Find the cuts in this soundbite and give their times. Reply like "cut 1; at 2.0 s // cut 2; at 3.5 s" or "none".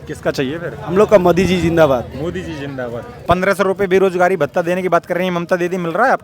cut 1; at 3.1 s